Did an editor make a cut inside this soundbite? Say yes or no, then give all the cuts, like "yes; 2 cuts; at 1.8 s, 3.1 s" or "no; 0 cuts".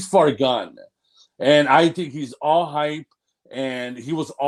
no; 0 cuts